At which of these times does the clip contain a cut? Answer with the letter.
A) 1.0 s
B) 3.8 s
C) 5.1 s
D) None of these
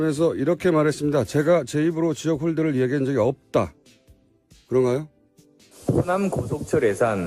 C